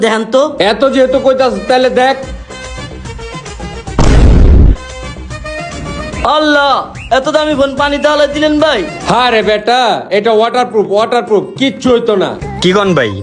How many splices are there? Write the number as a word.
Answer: zero